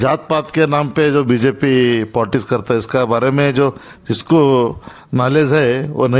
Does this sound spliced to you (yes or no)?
no